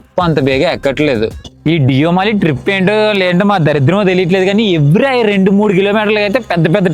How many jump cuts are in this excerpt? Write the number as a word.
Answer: one